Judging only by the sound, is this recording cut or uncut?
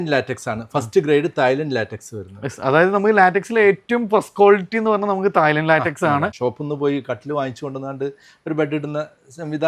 cut